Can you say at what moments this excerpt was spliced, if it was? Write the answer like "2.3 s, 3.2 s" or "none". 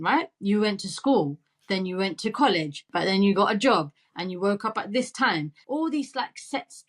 2.9 s, 5.6 s